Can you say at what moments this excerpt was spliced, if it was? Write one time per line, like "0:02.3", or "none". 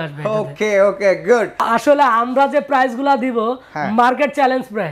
0:01.6